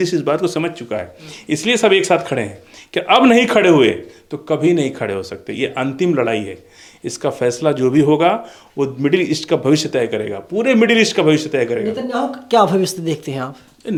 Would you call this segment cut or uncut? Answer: uncut